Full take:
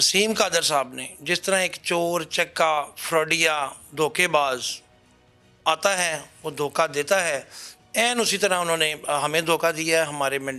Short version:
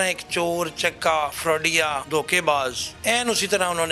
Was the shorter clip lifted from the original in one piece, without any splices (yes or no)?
no